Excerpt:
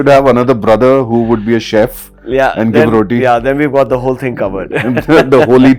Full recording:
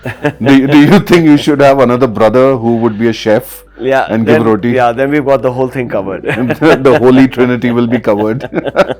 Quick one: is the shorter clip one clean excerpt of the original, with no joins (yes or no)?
yes